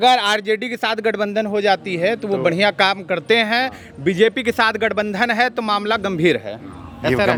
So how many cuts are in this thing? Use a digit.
0